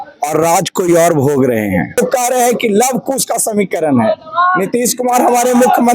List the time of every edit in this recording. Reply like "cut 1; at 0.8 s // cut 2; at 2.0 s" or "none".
cut 1; at 2.0 s